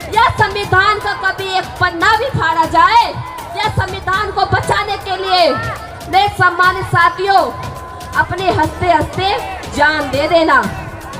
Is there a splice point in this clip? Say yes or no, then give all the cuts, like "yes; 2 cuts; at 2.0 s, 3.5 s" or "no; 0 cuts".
no; 0 cuts